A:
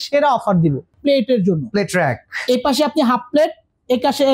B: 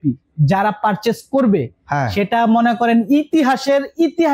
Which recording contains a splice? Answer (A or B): A